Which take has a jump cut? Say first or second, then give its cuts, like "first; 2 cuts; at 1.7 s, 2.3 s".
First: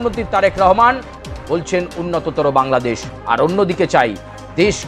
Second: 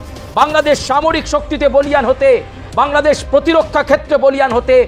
first; 1 cut; at 3.1 s